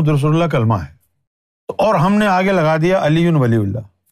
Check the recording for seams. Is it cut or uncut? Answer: cut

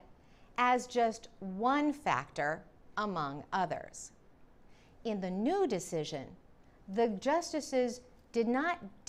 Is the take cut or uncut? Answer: uncut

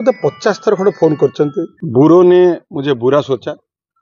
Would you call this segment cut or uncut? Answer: cut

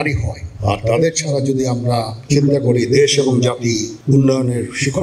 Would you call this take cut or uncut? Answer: cut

